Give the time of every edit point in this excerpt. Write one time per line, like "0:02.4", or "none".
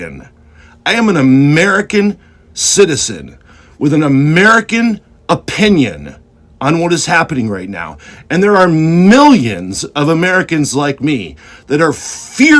none